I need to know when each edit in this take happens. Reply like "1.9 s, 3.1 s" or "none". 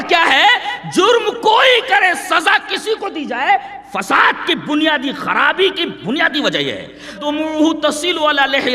7.2 s